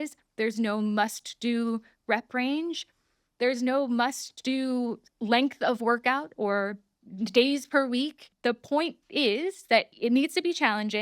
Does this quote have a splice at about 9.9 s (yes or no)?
yes